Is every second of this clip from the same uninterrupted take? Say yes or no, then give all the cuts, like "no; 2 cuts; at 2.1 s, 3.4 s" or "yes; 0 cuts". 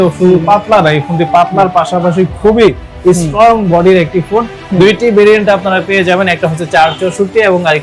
no; 1 cut; at 4.6 s